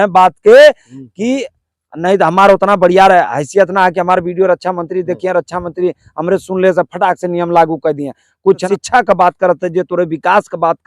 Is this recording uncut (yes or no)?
no